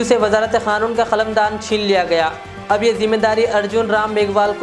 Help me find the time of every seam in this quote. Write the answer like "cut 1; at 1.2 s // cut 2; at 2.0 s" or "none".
none